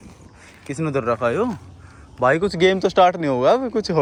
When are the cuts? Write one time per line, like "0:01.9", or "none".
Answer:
none